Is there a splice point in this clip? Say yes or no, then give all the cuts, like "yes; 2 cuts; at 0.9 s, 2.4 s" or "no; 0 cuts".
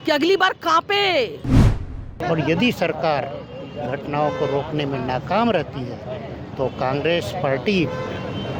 yes; 1 cut; at 1.8 s